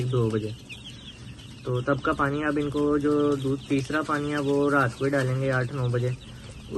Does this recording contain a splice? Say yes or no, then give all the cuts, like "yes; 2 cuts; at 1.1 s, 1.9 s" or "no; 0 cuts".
no; 0 cuts